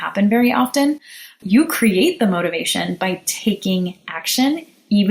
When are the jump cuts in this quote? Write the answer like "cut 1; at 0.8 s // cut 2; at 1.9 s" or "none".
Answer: cut 1; at 1.4 s